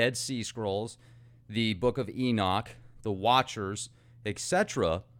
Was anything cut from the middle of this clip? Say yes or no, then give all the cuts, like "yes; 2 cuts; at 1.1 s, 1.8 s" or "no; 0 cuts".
yes; 1 cut; at 3.7 s